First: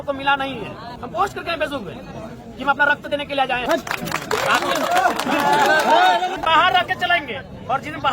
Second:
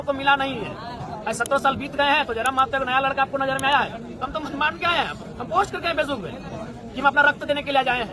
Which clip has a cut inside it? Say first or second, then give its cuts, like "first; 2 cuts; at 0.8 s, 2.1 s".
first; 3 cuts; at 0.9 s, 3.6 s, 6.4 s